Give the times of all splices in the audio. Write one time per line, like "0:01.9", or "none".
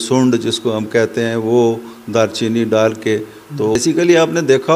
0:03.8

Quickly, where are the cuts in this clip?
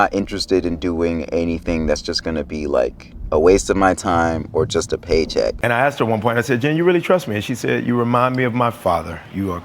0:05.6

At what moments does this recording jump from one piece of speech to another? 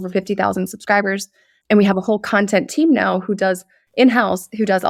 none

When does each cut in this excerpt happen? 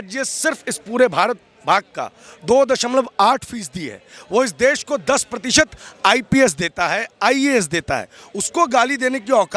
none

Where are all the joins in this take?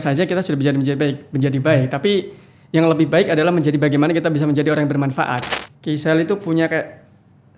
0:05.5

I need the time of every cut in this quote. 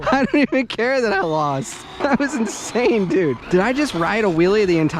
0:02.0
0:03.4

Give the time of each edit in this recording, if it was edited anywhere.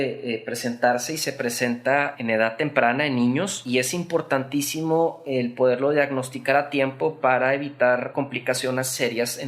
0:02.1
0:03.6
0:08.1

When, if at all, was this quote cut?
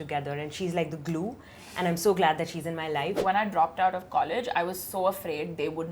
0:03.2

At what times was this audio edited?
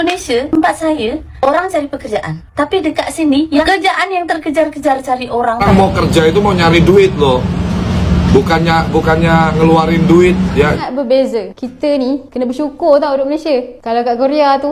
0:03.7
0:05.6
0:10.8

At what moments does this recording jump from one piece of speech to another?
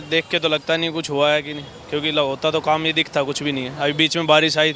none

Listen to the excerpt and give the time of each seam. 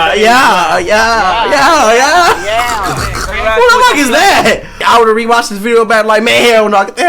0:04.8

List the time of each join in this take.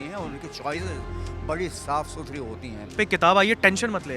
0:02.9

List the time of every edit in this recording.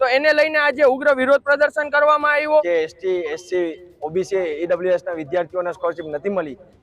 0:02.6

